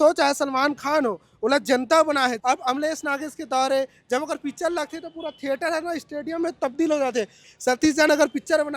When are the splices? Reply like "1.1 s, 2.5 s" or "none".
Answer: 2.4 s, 7.5 s